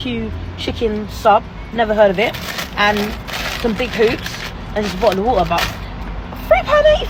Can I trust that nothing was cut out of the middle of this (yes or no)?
yes